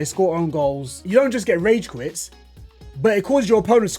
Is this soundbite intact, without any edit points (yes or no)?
no